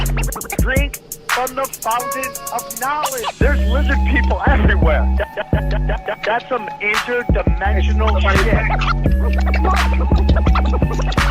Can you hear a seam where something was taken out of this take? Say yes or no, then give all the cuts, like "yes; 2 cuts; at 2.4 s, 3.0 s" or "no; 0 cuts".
yes; 1 cut; at 3.8 s